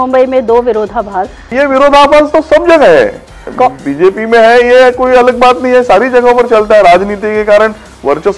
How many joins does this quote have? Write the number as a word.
one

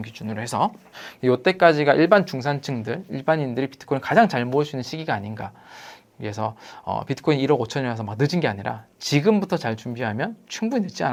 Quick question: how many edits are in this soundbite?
zero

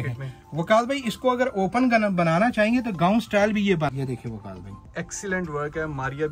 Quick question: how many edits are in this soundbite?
one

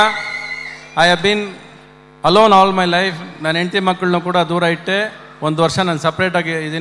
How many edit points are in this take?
zero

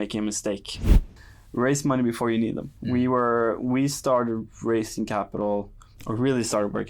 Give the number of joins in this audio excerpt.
one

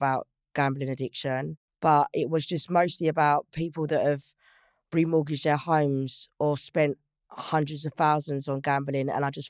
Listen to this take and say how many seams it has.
one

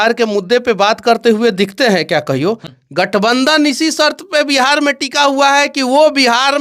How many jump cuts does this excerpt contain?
one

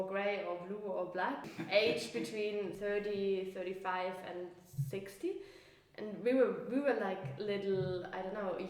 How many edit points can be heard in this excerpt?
two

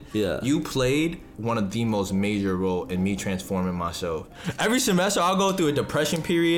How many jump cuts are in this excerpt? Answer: two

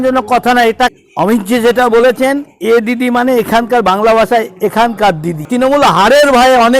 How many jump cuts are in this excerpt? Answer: two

